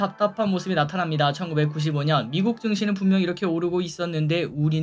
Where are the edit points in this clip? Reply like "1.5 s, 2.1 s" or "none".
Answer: none